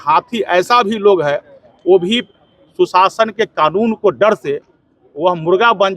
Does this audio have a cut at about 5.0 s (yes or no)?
no